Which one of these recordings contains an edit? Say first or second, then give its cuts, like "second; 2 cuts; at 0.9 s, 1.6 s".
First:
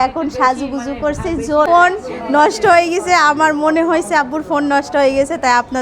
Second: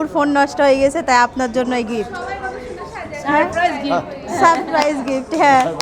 first; 1 cut; at 1.7 s